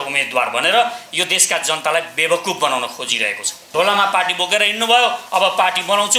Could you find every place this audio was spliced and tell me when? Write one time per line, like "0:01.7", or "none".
0:03.6

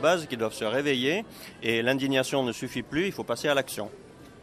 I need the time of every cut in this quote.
none

